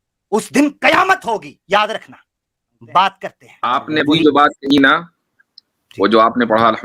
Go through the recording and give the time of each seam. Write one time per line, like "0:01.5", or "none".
0:03.6